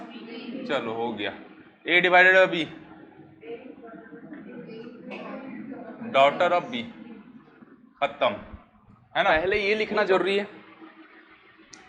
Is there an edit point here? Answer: yes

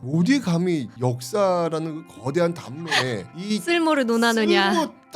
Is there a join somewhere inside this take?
yes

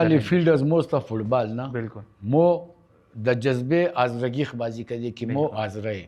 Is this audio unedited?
yes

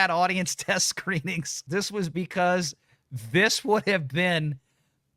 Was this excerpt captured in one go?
no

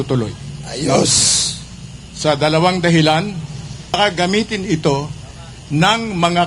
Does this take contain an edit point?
yes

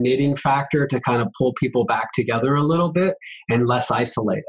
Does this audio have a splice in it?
no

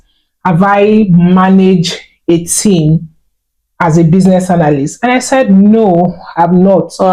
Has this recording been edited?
no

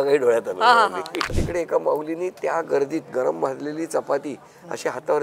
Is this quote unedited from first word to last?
no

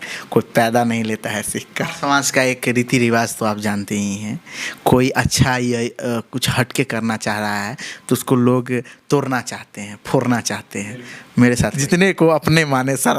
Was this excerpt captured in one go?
no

